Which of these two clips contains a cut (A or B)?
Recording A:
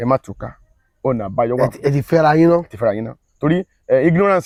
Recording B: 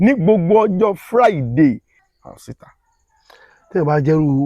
B